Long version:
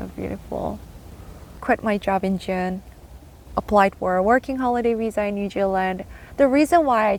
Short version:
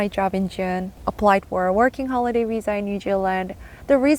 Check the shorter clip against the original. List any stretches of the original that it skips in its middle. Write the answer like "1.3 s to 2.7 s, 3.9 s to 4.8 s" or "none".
2.9 s to 3.5 s